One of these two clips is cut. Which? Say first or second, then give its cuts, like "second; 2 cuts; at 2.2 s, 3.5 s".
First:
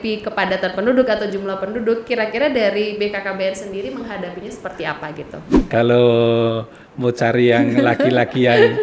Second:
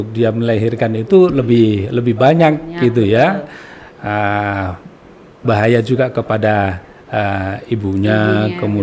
first; 1 cut; at 5.5 s